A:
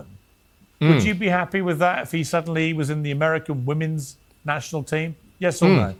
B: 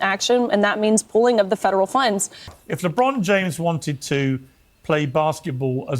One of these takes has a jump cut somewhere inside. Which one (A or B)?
B